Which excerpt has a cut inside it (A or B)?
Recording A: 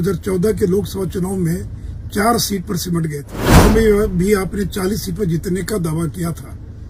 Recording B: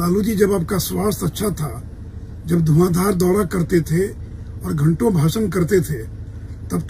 A